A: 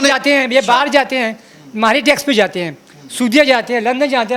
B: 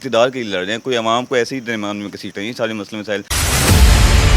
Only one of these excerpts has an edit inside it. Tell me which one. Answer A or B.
B